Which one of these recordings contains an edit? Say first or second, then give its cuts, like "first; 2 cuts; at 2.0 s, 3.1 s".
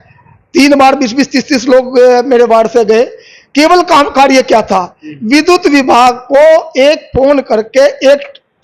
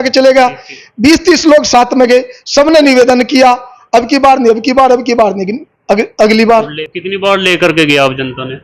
second; 1 cut; at 6.8 s